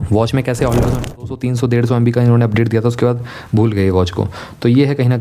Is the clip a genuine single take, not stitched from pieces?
no; 1 cut; at 1.2 s

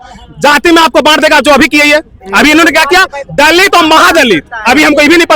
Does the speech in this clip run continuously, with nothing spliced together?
yes; 0 cuts

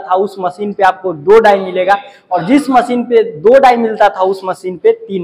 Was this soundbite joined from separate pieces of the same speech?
no; 0 cuts

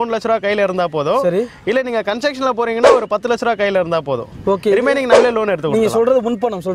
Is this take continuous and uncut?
yes; 0 cuts

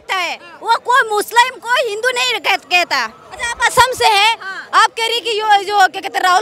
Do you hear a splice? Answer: no; 0 cuts

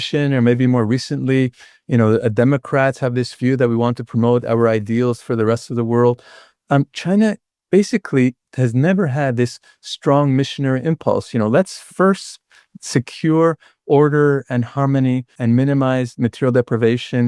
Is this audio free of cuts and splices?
no; 1 cut; at 15.4 s

